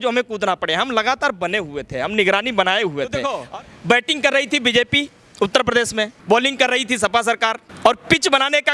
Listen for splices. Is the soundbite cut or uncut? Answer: cut